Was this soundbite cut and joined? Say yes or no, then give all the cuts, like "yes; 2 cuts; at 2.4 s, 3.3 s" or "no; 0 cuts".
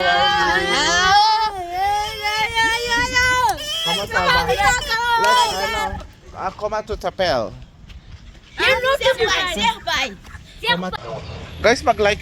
yes; 1 cut; at 11.0 s